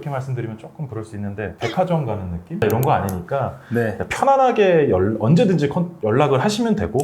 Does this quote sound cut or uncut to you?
cut